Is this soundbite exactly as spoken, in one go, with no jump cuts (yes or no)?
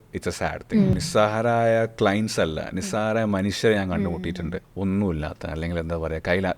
no